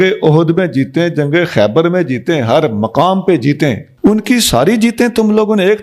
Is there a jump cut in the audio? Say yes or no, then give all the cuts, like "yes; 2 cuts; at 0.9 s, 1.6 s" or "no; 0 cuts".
yes; 1 cut; at 3.9 s